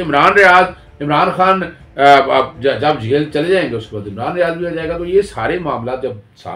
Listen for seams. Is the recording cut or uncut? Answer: uncut